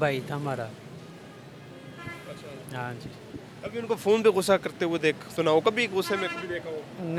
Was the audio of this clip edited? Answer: no; 0 cuts

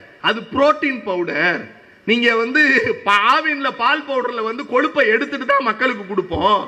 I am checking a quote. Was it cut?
no; 0 cuts

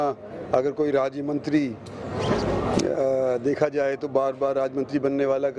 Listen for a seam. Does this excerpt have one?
no; 0 cuts

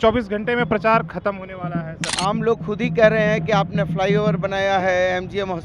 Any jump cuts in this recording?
yes; 1 cut; at 2.0 s

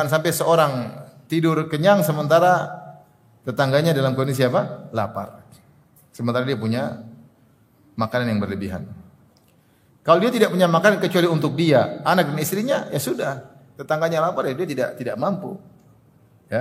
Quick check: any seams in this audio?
no; 0 cuts

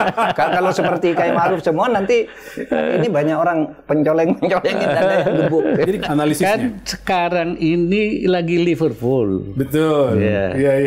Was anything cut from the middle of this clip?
yes; 1 cut; at 6.0 s

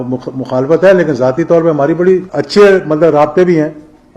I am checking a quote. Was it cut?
yes; 1 cut; at 2.4 s

